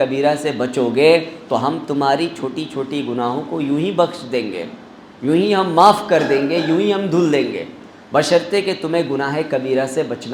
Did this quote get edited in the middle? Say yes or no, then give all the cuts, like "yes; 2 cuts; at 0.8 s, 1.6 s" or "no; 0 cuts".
no; 0 cuts